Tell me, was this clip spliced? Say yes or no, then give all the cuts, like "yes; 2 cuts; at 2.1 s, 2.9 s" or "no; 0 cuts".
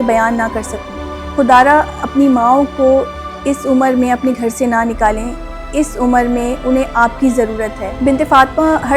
yes; 1 cut; at 0.9 s